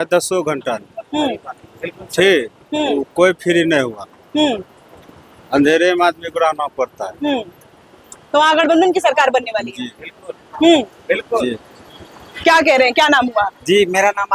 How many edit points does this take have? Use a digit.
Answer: 0